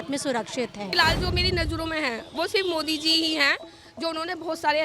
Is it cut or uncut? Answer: cut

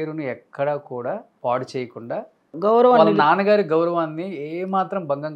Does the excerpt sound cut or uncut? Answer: cut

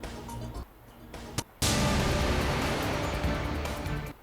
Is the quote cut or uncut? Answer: cut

